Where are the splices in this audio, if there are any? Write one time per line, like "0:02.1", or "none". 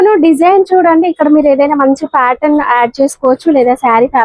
none